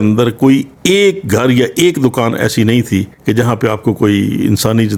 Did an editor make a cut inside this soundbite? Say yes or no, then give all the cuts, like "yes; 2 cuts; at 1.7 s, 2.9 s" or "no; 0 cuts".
no; 0 cuts